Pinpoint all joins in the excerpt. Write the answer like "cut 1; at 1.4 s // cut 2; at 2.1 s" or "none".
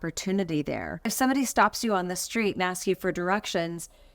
cut 1; at 0.9 s